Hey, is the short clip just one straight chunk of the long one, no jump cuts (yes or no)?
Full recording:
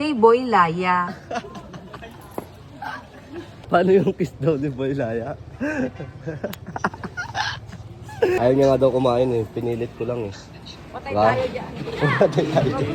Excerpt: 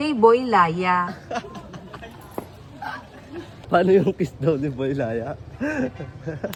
yes